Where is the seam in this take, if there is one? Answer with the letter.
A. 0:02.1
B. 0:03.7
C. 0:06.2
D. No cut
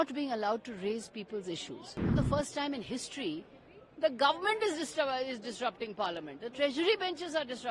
A